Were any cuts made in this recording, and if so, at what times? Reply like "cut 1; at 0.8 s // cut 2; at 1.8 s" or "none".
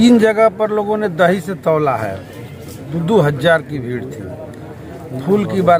none